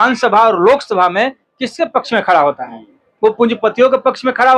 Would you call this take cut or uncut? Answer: uncut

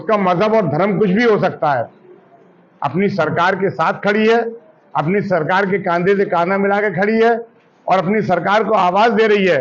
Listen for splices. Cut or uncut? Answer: uncut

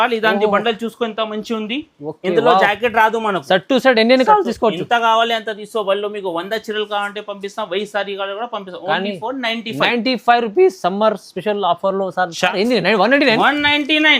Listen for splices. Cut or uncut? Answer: cut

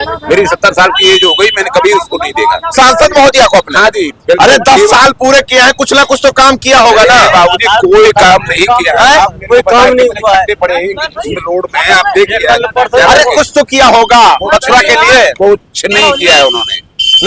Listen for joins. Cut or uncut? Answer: uncut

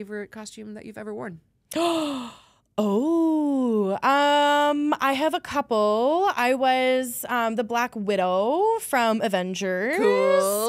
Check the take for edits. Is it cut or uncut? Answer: uncut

